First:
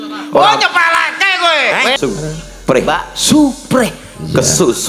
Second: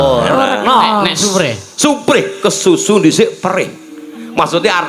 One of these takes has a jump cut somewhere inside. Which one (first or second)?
first